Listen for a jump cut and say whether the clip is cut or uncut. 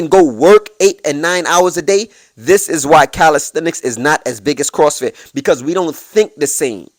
uncut